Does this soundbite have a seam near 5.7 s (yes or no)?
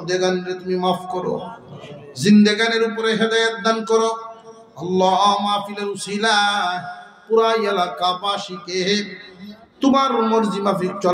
no